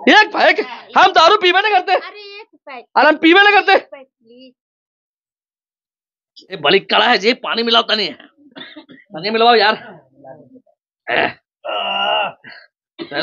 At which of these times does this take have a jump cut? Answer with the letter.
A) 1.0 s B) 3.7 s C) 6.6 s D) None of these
C